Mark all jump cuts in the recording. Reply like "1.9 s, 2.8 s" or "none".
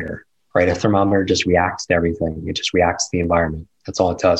none